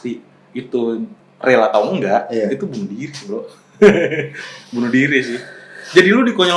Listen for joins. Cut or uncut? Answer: uncut